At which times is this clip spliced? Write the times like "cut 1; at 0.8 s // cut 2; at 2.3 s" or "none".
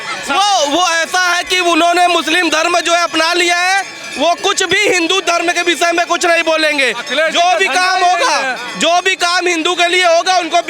none

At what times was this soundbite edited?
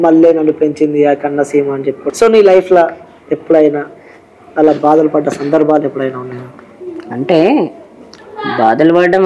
cut 1; at 2.0 s

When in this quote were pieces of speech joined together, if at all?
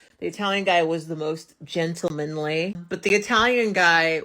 cut 1; at 2.8 s

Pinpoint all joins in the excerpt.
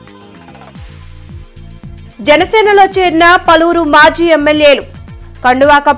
none

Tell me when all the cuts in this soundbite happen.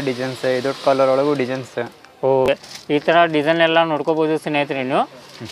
cut 1; at 2.5 s

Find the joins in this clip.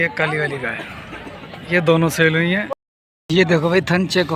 cut 1; at 2.7 s

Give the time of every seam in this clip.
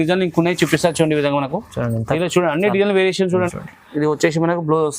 cut 1; at 3.5 s

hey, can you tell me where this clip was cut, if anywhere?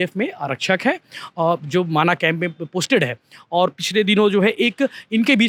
none

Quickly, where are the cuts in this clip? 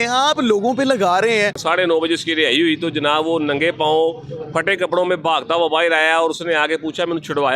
cut 1; at 1.6 s

